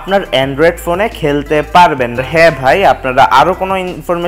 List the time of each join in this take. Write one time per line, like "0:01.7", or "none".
0:02.2